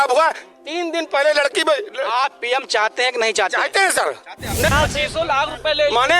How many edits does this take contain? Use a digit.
1